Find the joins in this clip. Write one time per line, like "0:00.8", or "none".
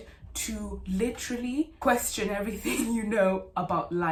none